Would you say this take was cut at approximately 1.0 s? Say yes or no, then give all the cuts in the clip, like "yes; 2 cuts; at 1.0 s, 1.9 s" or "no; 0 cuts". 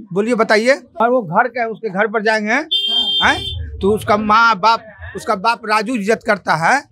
yes; 1 cut; at 1.0 s